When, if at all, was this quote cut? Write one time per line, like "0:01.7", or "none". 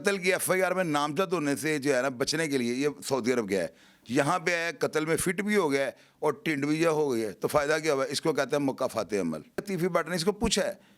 0:09.6